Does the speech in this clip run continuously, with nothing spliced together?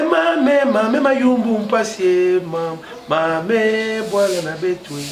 yes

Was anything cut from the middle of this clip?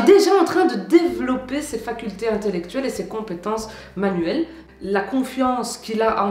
yes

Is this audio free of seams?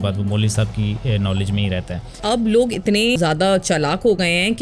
no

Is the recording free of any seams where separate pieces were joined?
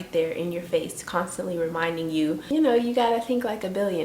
no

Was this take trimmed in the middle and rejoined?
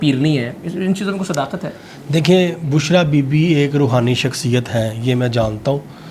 no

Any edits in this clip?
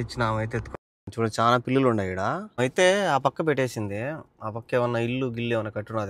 yes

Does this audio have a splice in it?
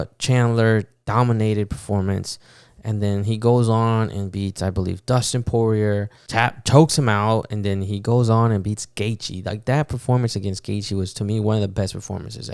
yes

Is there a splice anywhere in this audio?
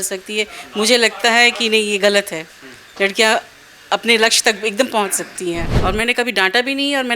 yes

